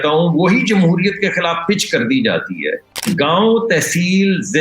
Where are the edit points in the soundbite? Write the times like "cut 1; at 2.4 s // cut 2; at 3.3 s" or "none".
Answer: cut 1; at 3.1 s